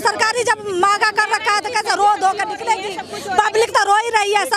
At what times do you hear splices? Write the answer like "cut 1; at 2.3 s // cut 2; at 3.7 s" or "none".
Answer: none